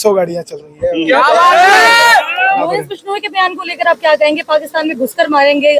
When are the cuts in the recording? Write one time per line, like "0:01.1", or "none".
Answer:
0:02.9